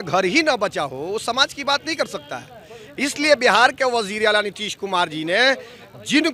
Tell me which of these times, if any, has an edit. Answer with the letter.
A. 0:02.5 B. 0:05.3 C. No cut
C